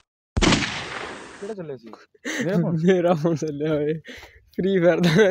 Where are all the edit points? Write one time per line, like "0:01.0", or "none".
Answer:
0:01.3